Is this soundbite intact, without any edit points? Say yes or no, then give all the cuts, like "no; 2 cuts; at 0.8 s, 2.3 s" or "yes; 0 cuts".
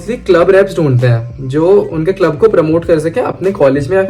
yes; 0 cuts